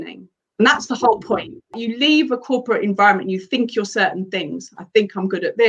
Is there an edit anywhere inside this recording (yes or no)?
yes